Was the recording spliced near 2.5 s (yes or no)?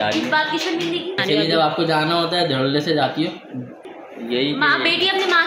no